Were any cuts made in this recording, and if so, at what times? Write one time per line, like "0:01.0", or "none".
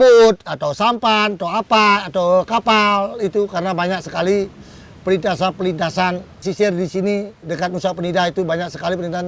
0:06.4